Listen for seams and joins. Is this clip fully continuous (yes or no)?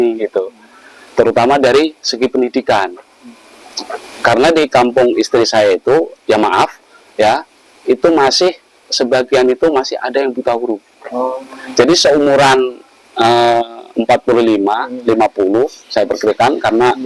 yes